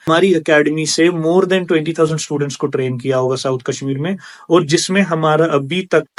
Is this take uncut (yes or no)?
yes